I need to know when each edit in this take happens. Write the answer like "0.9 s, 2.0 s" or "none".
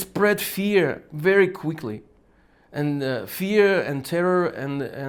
none